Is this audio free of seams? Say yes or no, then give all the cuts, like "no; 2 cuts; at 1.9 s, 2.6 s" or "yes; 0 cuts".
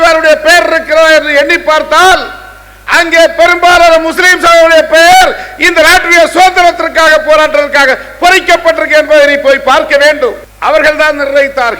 no; 1 cut; at 10.5 s